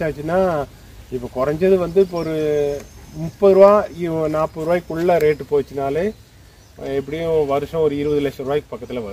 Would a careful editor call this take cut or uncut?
uncut